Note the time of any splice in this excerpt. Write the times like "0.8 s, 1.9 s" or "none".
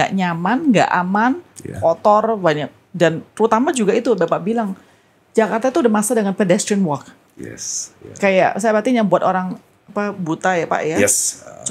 none